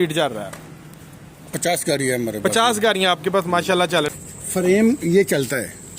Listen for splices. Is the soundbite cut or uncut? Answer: cut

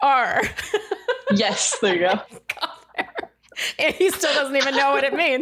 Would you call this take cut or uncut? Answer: uncut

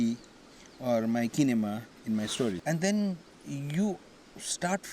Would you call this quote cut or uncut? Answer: cut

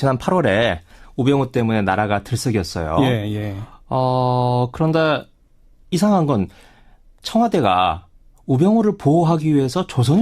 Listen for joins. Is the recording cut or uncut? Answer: uncut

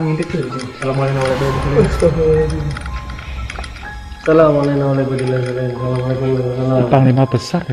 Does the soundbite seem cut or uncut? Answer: uncut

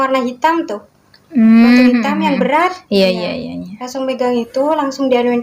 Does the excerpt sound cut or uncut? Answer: uncut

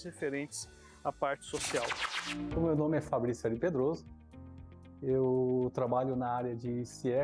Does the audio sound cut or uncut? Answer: cut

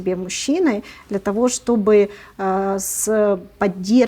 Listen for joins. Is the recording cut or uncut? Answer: uncut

